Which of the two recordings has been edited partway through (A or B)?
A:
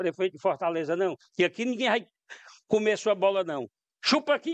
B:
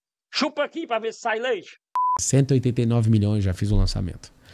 B